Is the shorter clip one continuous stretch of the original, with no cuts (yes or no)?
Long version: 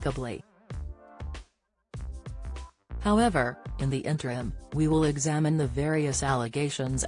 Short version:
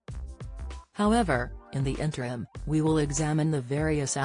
no